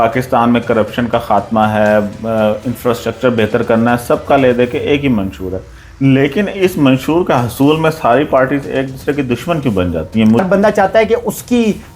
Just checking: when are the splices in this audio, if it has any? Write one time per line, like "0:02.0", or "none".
0:10.4